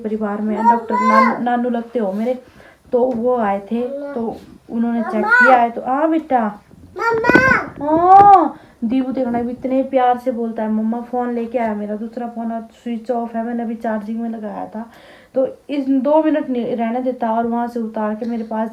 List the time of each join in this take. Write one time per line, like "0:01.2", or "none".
none